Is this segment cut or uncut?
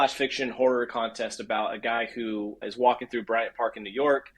cut